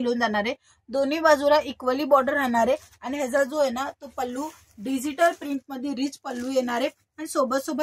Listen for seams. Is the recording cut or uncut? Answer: uncut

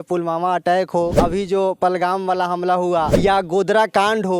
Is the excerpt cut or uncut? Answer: cut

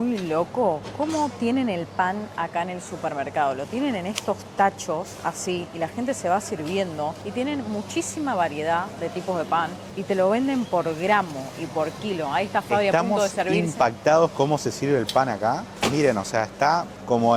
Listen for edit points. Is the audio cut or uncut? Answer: uncut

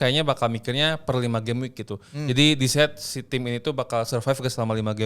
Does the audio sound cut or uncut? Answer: uncut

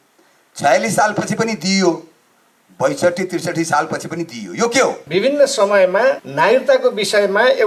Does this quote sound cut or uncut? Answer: cut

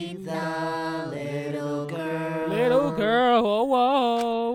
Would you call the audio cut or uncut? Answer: uncut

